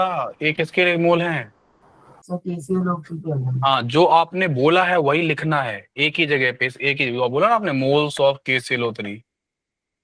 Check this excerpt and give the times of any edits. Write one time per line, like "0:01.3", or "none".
none

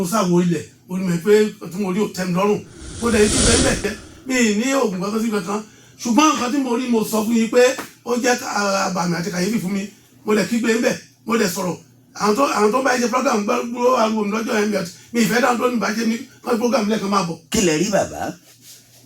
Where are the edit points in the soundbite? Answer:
0:03.9

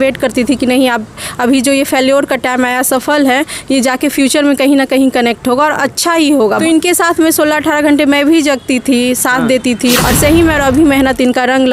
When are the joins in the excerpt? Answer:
0:06.6
0:10.0

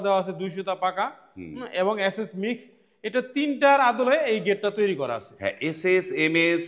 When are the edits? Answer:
none

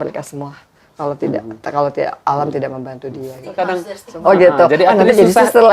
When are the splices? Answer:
0:03.5

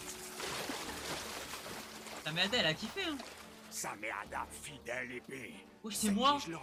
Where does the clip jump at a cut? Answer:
none

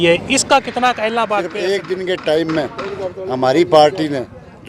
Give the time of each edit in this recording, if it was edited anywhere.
0:01.5

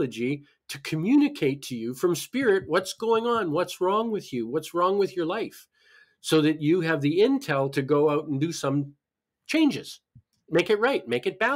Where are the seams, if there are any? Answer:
0:10.3

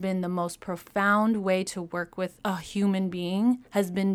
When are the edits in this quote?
0:02.4

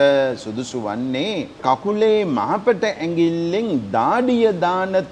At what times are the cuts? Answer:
0:01.6

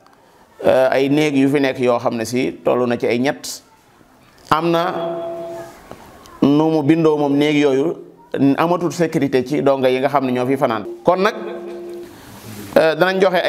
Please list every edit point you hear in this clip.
0:10.8

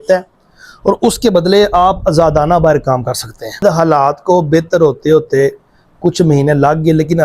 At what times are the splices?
0:03.6

